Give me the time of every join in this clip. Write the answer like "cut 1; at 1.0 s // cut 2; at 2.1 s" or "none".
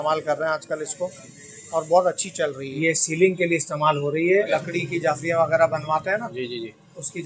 cut 1; at 2.8 s // cut 2; at 4.5 s

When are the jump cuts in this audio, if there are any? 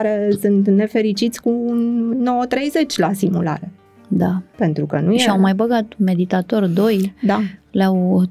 none

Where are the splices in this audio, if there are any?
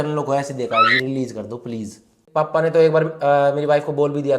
cut 1; at 2.2 s

